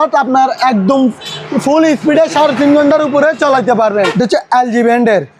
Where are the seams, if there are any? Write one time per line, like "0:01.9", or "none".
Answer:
0:04.1